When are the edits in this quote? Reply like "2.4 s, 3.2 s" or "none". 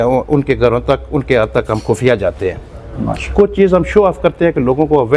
none